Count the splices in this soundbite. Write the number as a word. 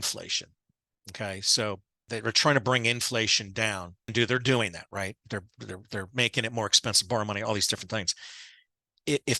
two